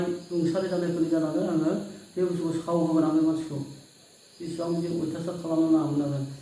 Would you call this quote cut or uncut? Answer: uncut